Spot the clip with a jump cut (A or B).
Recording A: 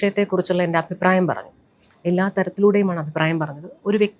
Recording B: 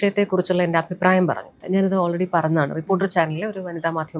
B